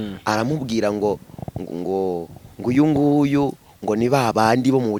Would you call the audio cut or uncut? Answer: uncut